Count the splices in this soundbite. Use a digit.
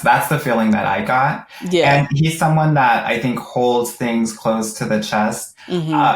0